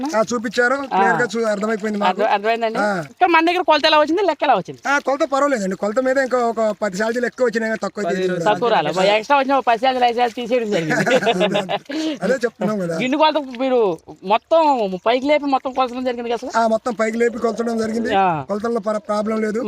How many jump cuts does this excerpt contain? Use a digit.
1